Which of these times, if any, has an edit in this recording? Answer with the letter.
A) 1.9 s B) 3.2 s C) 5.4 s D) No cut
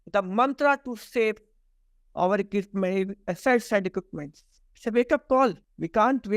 D